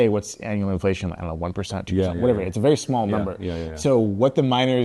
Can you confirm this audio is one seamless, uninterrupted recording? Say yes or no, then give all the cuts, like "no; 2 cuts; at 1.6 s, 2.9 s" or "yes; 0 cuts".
yes; 0 cuts